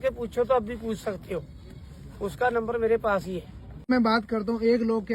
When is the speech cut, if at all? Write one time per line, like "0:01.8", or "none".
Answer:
0:03.9